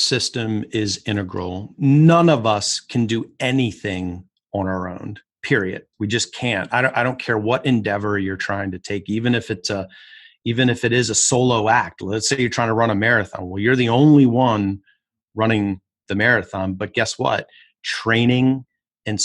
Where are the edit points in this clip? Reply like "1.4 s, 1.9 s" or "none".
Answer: 1.8 s, 5.9 s